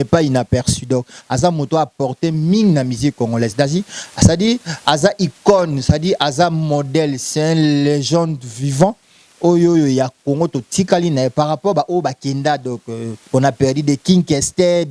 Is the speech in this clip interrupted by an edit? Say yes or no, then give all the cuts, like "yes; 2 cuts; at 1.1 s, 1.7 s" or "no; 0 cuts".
no; 0 cuts